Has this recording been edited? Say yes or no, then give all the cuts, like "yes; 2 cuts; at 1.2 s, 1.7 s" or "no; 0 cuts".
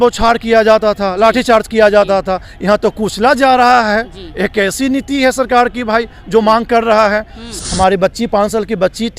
yes; 1 cut; at 7.5 s